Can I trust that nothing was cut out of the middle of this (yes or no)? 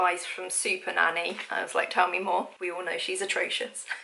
yes